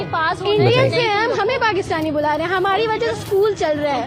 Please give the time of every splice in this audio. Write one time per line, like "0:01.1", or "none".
none